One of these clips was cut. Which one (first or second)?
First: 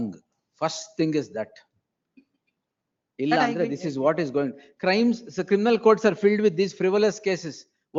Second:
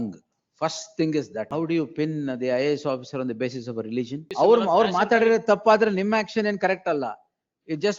second